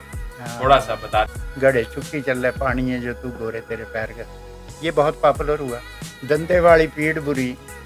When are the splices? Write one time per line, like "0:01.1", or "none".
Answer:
0:01.4

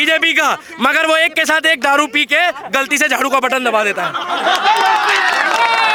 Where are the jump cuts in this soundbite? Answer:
none

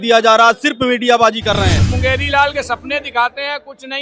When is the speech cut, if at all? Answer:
0:01.8

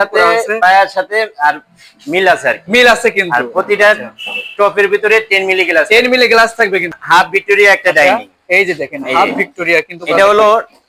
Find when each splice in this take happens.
0:07.0

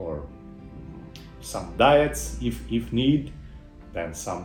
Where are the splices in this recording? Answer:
none

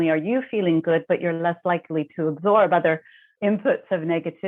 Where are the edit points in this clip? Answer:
0:03.3

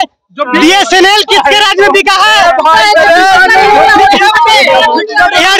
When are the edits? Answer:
none

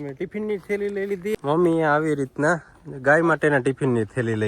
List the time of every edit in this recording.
0:01.3

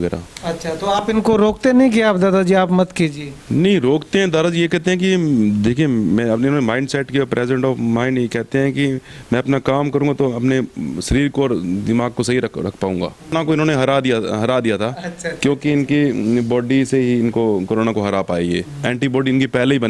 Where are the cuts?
0:13.3

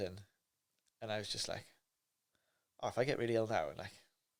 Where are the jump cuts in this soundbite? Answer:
none

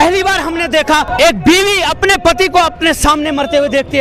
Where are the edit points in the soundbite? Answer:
0:01.1

